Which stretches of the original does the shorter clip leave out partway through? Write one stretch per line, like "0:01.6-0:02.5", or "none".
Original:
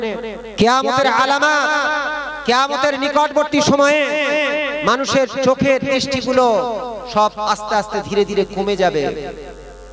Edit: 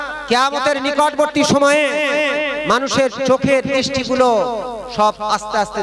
none